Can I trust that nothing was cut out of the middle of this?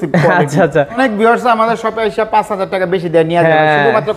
no; 1 cut; at 1.0 s

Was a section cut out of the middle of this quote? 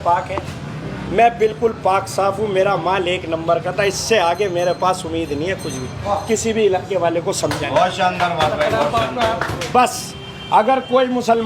no; 0 cuts

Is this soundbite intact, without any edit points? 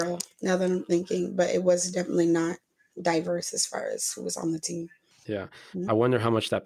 yes; 0 cuts

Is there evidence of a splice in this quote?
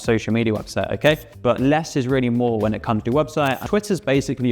yes; 2 cuts; at 1.3 s, 3.6 s

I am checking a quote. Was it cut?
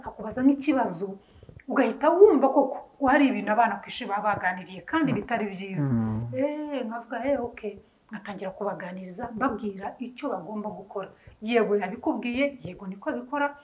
no; 0 cuts

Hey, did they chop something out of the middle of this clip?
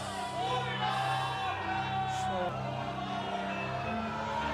yes; 1 cut; at 2.5 s

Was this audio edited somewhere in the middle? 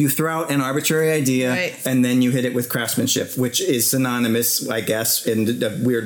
no; 0 cuts

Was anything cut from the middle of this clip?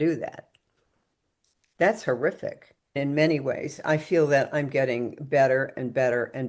yes; 1 cut; at 2.9 s

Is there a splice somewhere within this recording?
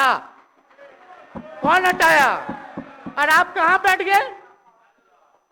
no; 0 cuts

